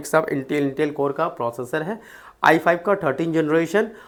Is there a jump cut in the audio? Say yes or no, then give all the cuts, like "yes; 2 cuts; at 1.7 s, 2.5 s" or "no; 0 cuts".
no; 0 cuts